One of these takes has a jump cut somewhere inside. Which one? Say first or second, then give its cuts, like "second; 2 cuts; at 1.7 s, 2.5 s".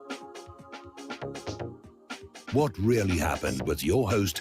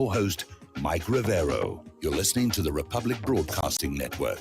second; 1 cut; at 1.9 s